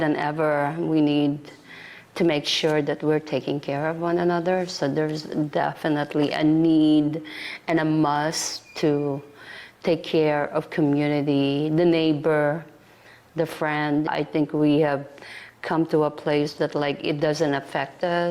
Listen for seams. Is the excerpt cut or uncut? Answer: uncut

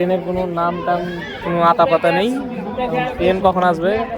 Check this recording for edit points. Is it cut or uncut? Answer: uncut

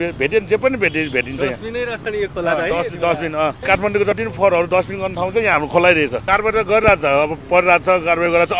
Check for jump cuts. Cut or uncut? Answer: cut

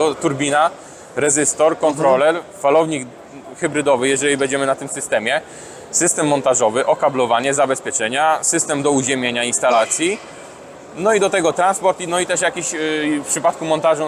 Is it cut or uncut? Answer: uncut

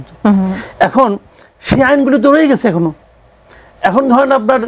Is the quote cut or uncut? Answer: uncut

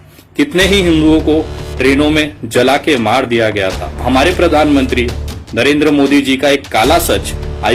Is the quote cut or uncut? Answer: cut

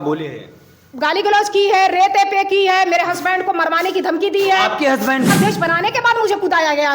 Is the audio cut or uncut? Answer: cut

